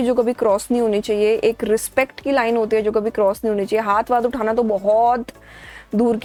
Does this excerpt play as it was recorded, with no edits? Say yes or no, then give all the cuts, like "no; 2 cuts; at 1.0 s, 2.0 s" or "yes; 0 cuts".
yes; 0 cuts